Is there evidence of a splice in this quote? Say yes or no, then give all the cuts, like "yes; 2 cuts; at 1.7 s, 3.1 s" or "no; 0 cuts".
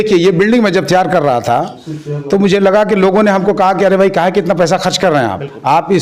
no; 0 cuts